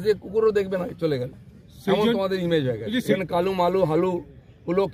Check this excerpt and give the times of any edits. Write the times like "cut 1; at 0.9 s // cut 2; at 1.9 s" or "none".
cut 1; at 3.2 s